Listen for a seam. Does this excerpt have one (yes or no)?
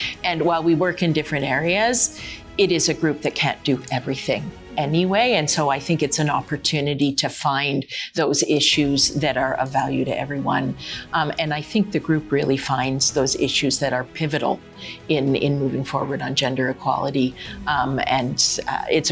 no